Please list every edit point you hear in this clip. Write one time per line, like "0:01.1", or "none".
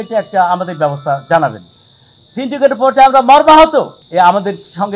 0:04.0